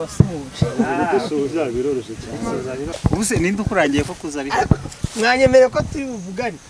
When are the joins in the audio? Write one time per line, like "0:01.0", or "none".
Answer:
0:02.9